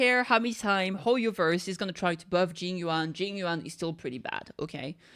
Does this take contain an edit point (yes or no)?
no